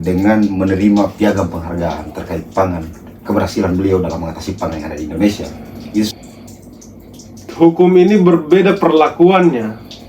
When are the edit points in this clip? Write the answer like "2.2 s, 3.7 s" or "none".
6.2 s